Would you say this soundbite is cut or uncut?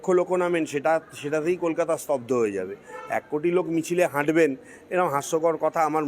uncut